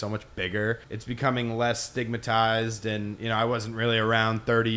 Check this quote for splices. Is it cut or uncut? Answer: cut